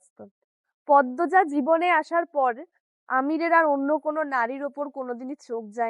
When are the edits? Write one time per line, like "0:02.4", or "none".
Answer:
none